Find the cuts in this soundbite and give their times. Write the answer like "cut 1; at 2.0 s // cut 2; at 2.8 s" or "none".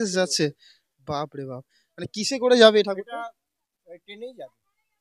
none